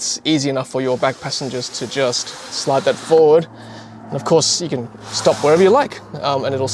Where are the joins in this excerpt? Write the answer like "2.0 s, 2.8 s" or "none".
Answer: none